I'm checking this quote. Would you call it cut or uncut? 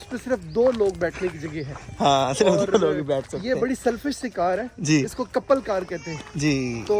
uncut